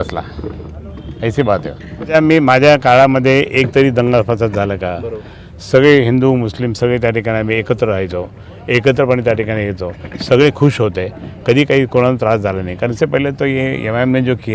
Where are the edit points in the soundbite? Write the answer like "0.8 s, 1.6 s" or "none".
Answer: 2.1 s, 12.9 s

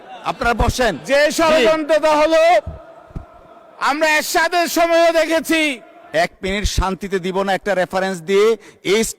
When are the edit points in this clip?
5.9 s

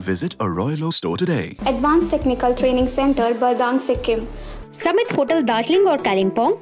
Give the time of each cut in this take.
1.5 s, 4.5 s

